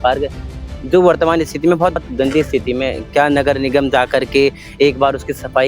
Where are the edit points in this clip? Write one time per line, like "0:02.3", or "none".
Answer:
0:02.0